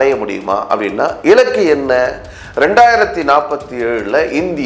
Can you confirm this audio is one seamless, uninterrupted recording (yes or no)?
yes